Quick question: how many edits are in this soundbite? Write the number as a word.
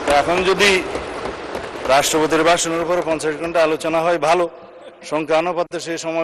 zero